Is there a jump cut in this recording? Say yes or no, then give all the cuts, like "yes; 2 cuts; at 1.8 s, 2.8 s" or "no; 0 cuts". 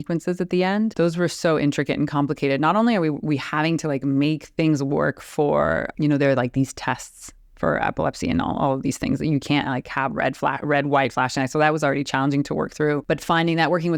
yes; 3 cuts; at 0.9 s, 5.9 s, 13.0 s